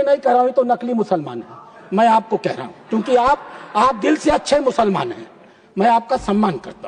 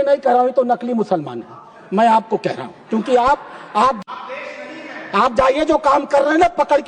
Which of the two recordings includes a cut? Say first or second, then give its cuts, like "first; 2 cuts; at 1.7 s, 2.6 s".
second; 1 cut; at 4.0 s